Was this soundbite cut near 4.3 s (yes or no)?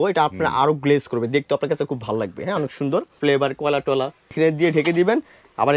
yes